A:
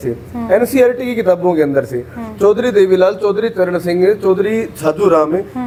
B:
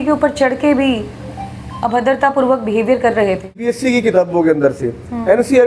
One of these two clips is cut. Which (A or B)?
B